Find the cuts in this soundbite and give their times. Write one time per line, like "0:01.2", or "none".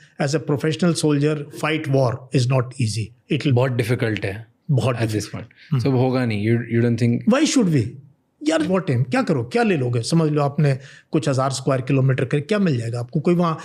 0:01.6
0:03.5
0:08.7